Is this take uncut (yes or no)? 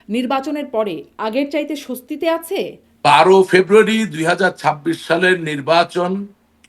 no